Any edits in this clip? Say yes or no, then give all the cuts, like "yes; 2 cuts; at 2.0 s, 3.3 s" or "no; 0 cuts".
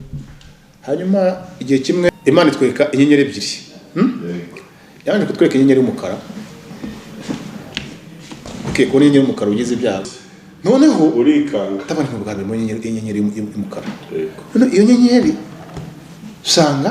yes; 2 cuts; at 2.1 s, 10.0 s